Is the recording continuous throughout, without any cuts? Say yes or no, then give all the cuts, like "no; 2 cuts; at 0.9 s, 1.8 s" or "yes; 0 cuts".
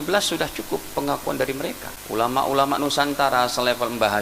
no; 1 cut; at 1.9 s